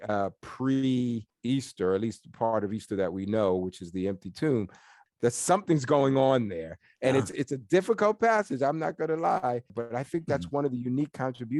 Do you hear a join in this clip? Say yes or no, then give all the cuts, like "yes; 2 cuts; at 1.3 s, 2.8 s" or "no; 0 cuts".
yes; 3 cuts; at 1.3 s, 5.0 s, 9.7 s